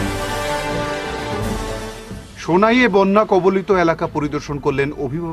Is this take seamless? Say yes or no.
yes